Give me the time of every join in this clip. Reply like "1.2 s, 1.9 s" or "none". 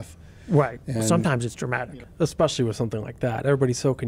1.8 s